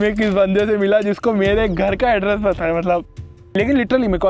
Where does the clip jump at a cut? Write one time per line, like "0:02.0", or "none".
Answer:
0:03.3